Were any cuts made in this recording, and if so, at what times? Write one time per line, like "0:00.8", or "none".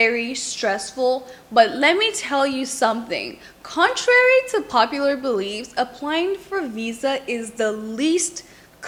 none